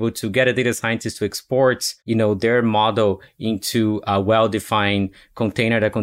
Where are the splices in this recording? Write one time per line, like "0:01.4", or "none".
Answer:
0:01.9

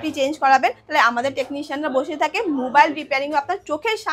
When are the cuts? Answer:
none

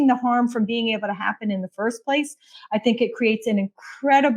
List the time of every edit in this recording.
none

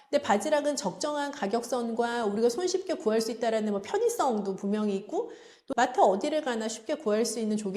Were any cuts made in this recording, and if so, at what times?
0:05.6

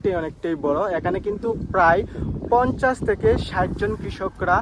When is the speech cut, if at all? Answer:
none

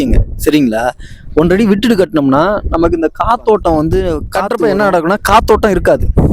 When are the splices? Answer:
0:04.2

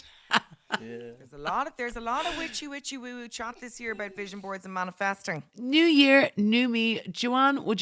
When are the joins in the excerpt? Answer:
0:05.5

